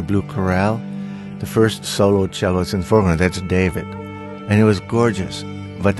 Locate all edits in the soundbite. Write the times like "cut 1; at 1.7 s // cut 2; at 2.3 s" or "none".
none